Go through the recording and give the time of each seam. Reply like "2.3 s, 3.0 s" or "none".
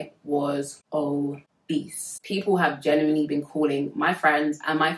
1.9 s